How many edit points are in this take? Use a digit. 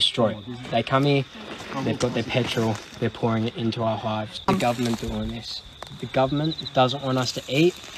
1